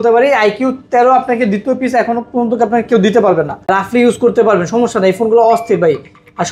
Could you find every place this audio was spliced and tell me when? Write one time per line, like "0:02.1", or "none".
0:03.7